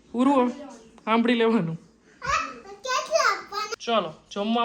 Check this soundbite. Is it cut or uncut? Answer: cut